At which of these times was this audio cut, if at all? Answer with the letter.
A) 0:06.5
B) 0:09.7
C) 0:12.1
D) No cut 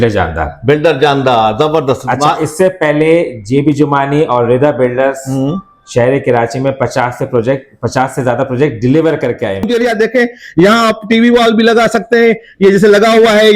B